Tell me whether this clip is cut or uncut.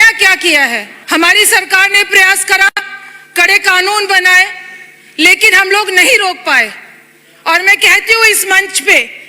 cut